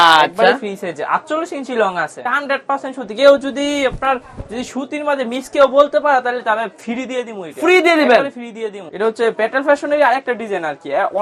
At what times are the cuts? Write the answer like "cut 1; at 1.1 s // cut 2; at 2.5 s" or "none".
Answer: cut 1; at 2.3 s // cut 2; at 8.9 s